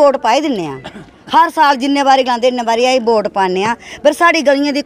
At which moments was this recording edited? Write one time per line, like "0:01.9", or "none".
none